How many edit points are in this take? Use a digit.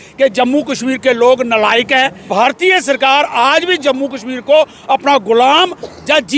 1